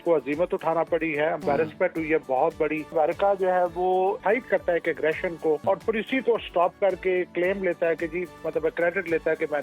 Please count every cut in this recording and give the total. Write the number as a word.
three